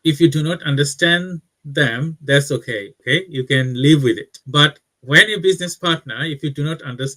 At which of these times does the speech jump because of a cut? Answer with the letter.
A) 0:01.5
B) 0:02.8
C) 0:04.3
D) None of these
C